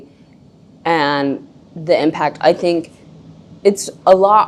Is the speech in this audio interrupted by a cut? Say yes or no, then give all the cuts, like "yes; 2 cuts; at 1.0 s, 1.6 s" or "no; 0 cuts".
no; 0 cuts